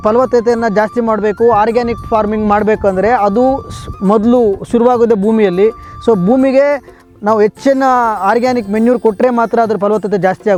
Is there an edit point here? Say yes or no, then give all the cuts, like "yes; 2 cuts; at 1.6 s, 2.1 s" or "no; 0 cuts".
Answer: no; 0 cuts